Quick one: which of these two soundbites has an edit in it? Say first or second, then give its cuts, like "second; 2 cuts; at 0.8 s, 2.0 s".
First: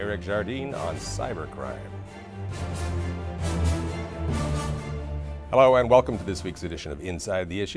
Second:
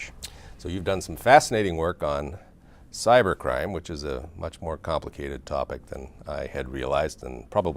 second; 1 cut; at 5.4 s